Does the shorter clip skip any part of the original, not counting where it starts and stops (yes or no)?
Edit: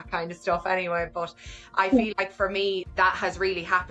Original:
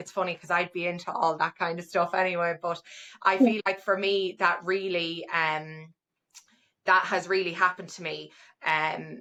yes